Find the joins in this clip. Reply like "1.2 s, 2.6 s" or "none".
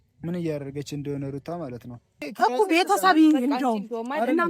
2.3 s